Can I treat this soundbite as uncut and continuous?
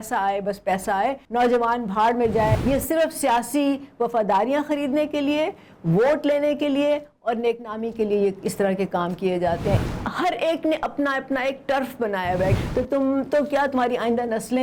no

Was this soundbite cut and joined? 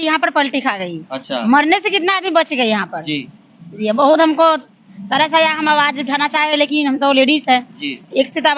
no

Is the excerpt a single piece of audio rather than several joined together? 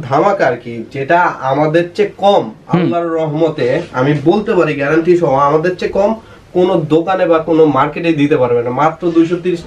yes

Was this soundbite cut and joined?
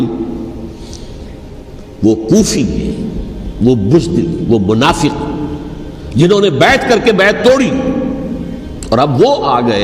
no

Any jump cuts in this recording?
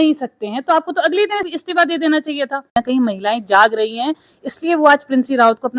yes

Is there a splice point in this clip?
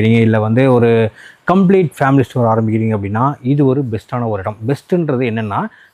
no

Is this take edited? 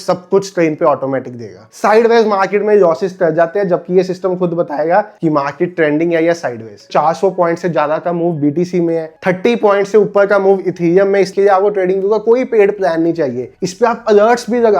yes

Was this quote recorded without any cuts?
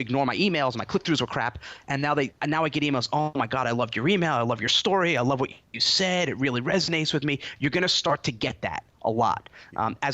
no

